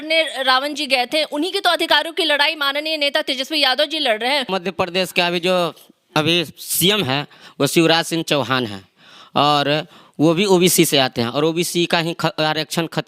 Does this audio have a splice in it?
yes; 1 cut; at 4.4 s

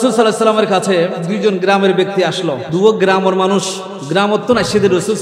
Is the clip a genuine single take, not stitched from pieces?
no; 2 cuts; at 1.3 s, 2.6 s

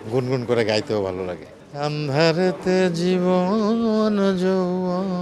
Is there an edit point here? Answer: yes; 1 cut; at 1.6 s

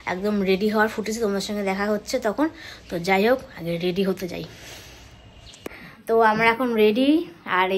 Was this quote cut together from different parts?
no; 0 cuts

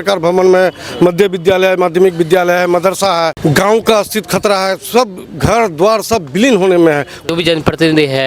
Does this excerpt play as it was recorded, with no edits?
no; 2 cuts; at 3.4 s, 7.3 s

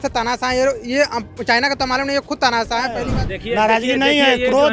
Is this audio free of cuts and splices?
no; 1 cut; at 3.0 s

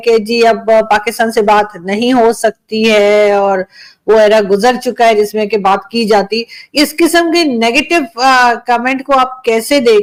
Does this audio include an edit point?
no; 0 cuts

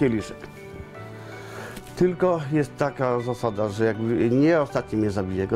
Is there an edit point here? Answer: no; 0 cuts

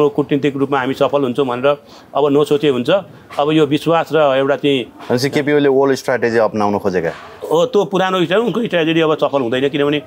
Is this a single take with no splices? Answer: yes; 0 cuts

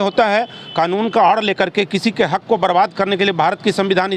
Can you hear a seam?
no; 0 cuts

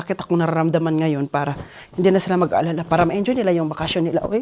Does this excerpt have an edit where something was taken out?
no; 0 cuts

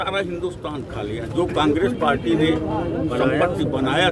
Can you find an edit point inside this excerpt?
no; 0 cuts

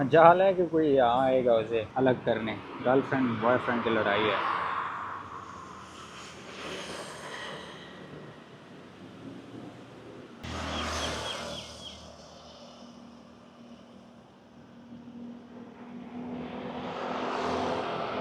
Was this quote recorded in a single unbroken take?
yes; 0 cuts

